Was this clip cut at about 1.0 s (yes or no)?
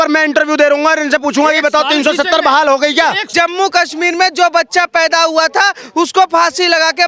no